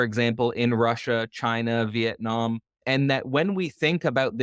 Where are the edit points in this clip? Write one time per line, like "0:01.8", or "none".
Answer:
0:02.7